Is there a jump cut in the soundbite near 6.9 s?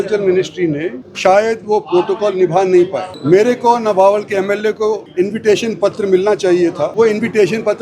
yes; 4 cuts; at 1.0 s, 3.1 s, 5.0 s, 6.9 s

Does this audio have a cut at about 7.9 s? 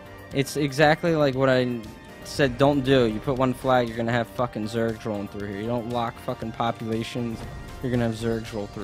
yes; 1 cut; at 7.9 s

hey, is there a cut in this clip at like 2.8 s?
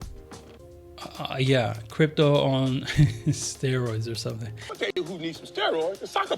no; 1 cut; at 4.8 s

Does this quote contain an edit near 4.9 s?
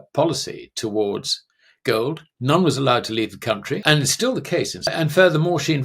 yes; 2 cuts; at 3.8 s, 4.9 s

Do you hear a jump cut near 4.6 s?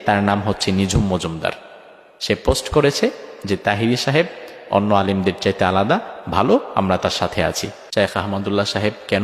no; 1 cut; at 7.7 s

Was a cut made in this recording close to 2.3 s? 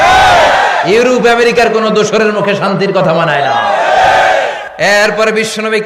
no; 1 cut; at 4.6 s

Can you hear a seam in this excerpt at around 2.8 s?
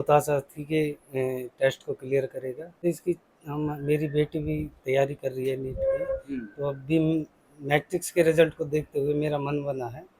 yes; 1 cut; at 2.8 s

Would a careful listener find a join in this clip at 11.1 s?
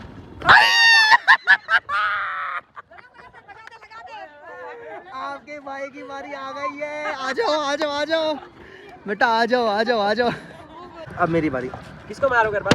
yes; 1 cut; at 11.1 s

